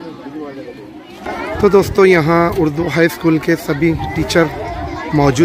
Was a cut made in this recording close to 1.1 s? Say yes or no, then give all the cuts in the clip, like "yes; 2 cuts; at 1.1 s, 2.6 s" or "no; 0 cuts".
yes; 1 cut; at 1.1 s